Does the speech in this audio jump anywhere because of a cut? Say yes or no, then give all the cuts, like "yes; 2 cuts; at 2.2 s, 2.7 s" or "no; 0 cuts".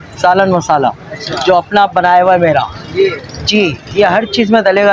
no; 0 cuts